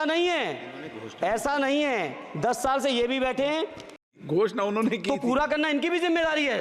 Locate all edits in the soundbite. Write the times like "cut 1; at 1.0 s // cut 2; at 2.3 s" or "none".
cut 1; at 4.1 s